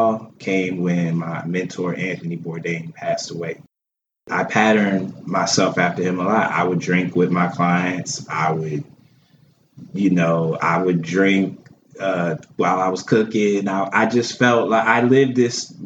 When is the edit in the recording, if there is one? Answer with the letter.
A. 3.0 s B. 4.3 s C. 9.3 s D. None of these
B